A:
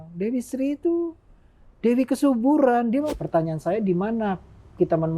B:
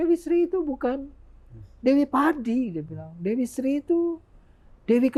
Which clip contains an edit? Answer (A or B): A